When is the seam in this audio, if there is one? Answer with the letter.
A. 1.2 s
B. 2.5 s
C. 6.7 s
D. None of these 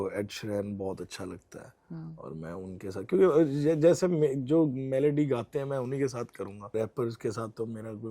C